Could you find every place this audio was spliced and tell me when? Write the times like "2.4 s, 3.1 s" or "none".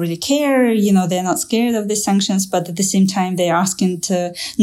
none